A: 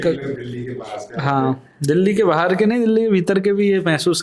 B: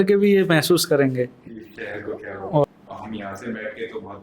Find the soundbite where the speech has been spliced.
B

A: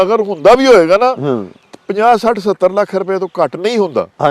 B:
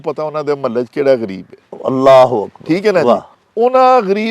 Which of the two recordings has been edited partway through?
B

